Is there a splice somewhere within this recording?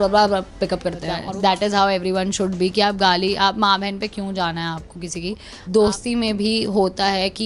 yes; 2 cuts; at 1.2 s, 5.5 s

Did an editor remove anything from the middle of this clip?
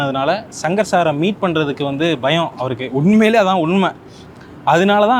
no; 0 cuts

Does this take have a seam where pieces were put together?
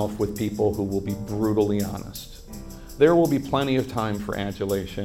yes; 1 cut; at 2.9 s

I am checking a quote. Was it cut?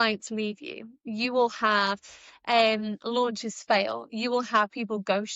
no; 0 cuts

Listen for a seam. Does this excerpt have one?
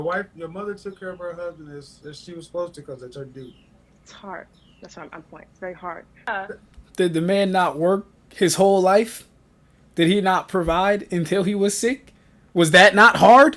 yes; 1 cut; at 6.3 s

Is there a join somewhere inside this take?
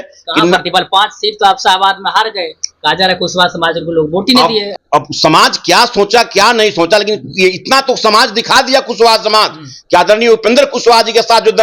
yes; 1 cut; at 4.7 s

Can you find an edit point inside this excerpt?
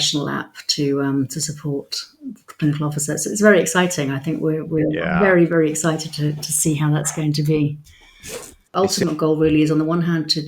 yes; 1 cut; at 8.7 s

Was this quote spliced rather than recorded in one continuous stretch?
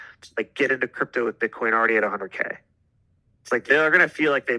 no; 0 cuts

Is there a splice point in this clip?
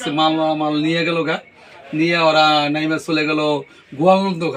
no; 0 cuts

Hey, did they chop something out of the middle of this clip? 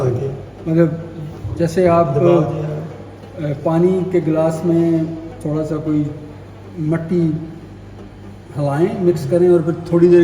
no; 0 cuts

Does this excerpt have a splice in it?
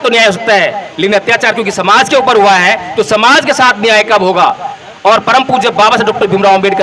no; 0 cuts

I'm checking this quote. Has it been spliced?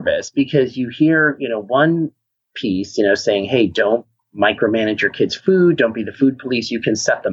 no; 0 cuts

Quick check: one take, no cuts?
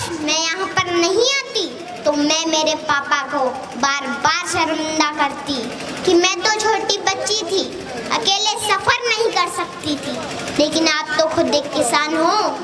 yes; 0 cuts

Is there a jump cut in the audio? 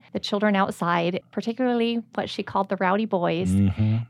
yes; 1 cut; at 1.2 s

